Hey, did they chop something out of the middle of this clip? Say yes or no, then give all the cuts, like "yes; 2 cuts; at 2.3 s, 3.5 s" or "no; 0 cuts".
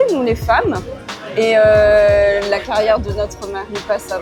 no; 0 cuts